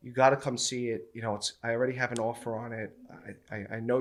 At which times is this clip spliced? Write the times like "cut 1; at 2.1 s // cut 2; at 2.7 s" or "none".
none